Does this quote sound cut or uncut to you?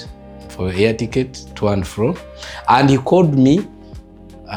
uncut